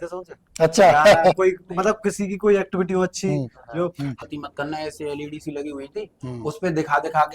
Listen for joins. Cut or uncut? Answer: cut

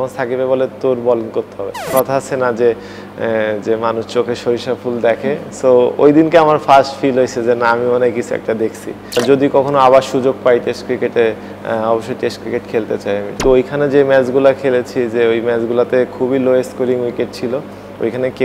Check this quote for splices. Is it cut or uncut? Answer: cut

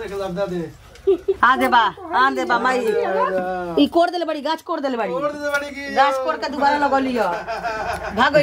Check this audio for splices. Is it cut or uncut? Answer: cut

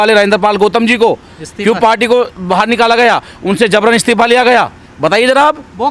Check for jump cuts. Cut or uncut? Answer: uncut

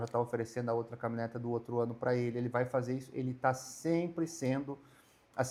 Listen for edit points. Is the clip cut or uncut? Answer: uncut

